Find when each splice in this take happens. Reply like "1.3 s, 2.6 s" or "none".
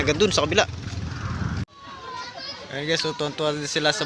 1.6 s